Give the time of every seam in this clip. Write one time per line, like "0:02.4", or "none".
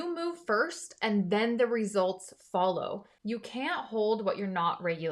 0:03.1